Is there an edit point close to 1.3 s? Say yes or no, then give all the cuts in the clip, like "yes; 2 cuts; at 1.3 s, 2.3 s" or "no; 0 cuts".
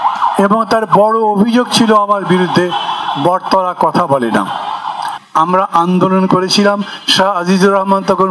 no; 1 cut; at 5.1 s